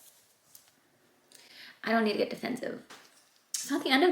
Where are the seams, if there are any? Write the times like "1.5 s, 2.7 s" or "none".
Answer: 2.9 s